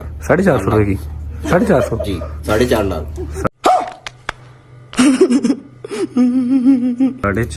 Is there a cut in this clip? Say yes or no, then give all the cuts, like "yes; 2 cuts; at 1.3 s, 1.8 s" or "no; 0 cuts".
no; 0 cuts